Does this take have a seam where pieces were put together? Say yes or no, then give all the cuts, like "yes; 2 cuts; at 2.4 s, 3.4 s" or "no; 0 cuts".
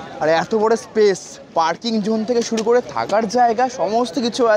no; 0 cuts